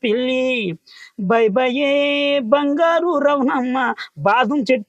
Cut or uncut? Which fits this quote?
uncut